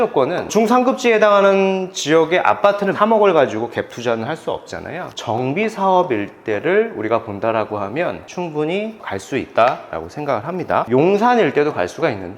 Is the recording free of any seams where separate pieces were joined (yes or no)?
no